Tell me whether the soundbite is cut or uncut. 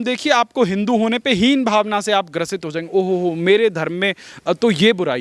uncut